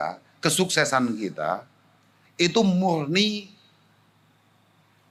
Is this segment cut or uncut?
uncut